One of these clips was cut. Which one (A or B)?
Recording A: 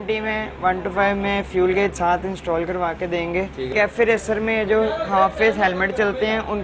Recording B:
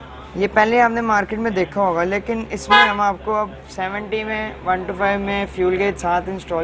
A